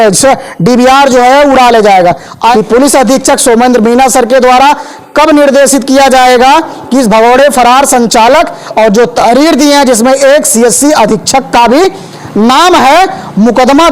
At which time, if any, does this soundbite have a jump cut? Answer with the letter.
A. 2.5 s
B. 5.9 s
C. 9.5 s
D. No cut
A